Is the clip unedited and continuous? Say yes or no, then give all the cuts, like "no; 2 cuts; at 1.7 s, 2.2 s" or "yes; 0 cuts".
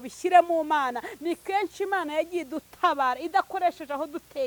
yes; 0 cuts